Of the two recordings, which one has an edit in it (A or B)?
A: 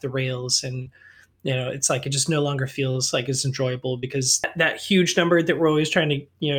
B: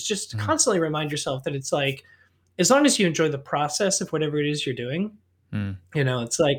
A